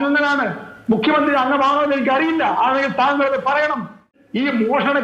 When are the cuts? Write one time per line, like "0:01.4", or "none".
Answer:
0:04.1